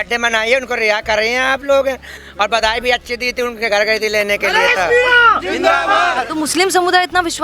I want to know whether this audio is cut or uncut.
cut